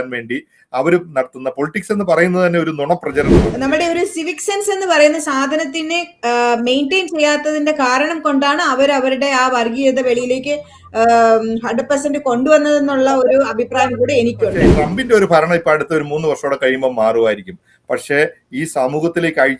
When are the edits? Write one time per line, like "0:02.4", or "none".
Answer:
0:03.4
0:14.7